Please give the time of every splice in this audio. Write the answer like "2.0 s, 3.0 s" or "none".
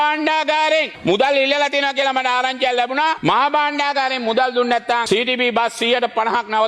none